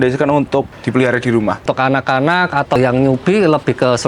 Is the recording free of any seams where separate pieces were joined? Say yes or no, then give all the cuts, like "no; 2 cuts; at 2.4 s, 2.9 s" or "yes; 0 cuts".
no; 2 cuts; at 1.7 s, 2.8 s